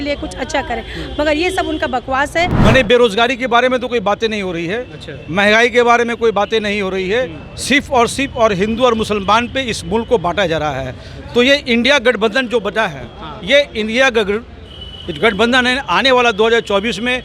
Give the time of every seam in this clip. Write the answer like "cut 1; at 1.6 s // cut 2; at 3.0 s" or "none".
cut 1; at 2.5 s